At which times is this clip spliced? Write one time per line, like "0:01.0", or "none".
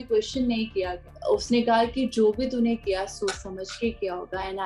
0:01.0